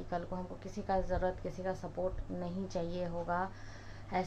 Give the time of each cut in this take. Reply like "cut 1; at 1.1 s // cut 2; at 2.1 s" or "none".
none